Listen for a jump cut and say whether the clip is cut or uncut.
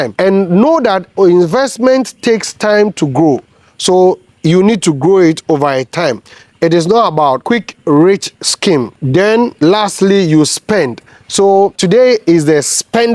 uncut